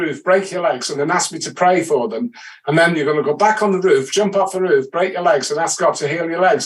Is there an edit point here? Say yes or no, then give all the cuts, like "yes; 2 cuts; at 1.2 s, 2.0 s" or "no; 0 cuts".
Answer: no; 0 cuts